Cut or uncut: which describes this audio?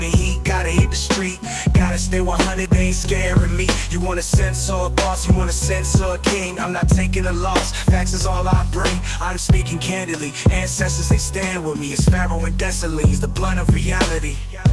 uncut